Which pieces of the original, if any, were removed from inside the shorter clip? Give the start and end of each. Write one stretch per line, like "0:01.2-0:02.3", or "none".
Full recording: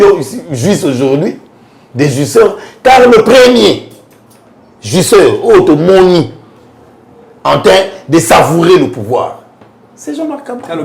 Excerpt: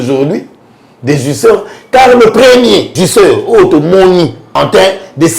0:03.8-0:04.9
0:06.4-0:07.3